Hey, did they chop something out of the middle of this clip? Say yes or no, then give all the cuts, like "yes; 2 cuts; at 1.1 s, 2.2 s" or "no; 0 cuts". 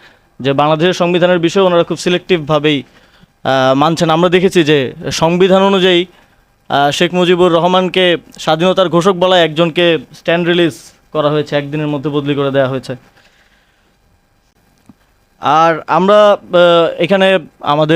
no; 0 cuts